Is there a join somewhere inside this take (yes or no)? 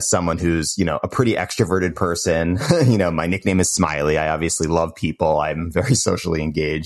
no